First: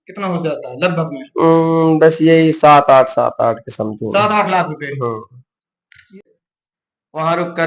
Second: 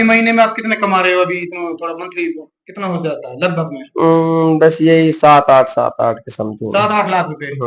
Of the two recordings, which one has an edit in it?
first; 1 cut; at 6.2 s

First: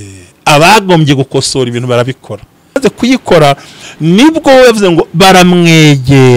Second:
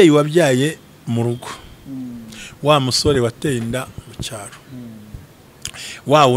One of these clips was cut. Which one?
first; 1 cut; at 2.8 s

